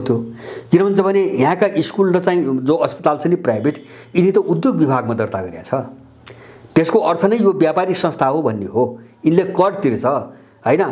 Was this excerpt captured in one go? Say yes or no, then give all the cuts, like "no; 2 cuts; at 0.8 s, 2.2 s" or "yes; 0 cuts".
yes; 0 cuts